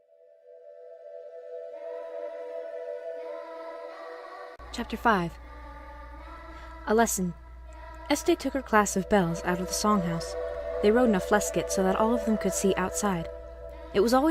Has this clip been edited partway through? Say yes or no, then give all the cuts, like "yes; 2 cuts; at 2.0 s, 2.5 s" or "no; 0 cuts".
no; 0 cuts